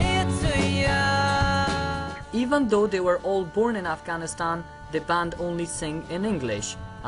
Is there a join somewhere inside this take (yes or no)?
yes